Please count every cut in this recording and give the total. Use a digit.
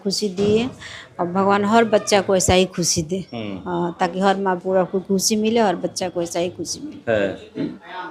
0